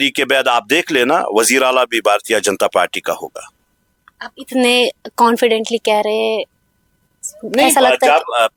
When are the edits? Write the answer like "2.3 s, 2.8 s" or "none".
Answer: none